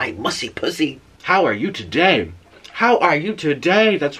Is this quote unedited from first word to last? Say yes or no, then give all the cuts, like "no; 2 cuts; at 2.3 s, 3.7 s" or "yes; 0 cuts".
no; 1 cut; at 1.0 s